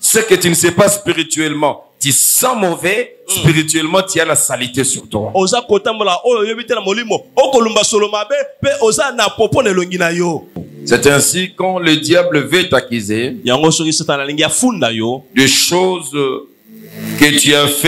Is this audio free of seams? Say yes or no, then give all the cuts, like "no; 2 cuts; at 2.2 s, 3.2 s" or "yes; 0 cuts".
no; 1 cut; at 10.6 s